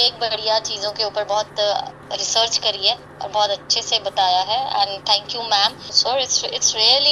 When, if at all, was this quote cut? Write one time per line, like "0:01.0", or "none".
0:05.9